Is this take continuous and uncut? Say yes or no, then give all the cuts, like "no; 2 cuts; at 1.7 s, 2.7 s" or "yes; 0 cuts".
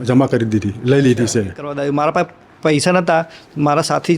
no; 1 cut; at 1.7 s